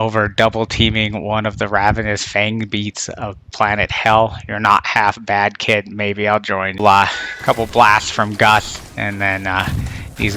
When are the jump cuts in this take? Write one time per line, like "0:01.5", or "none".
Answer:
0:06.8